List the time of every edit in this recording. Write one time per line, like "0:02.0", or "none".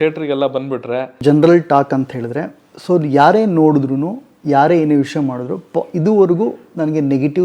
0:01.2